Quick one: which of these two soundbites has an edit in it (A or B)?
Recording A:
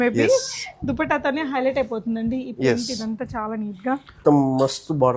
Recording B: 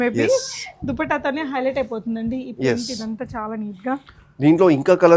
A